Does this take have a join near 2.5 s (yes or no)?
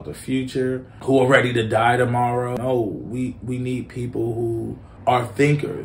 yes